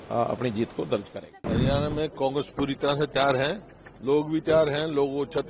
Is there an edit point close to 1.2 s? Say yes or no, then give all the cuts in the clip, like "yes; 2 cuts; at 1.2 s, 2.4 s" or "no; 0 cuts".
yes; 1 cut; at 1.2 s